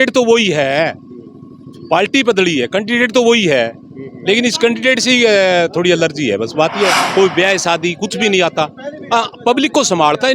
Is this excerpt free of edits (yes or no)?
no